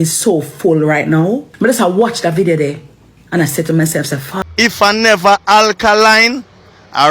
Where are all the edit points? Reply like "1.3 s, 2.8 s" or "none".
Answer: 1.5 s, 4.3 s

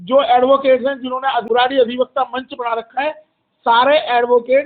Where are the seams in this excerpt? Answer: 1.4 s

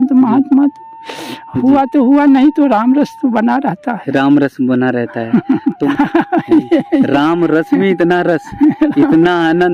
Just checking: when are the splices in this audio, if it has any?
5.9 s

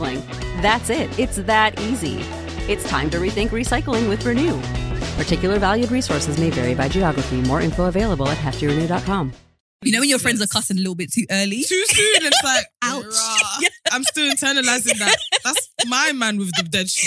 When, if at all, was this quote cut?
9.8 s

